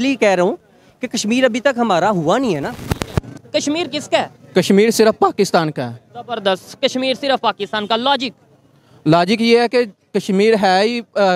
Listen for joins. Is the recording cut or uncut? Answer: cut